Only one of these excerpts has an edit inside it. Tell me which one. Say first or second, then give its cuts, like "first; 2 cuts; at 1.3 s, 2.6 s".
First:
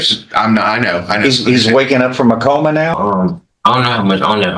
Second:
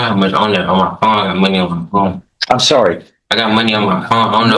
first; 1 cut; at 2.9 s